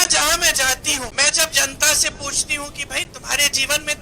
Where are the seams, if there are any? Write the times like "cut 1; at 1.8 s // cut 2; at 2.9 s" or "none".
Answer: cut 1; at 1.1 s